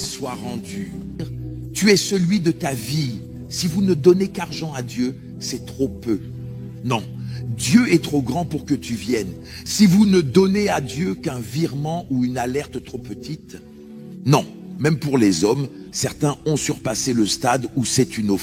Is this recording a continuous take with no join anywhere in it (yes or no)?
no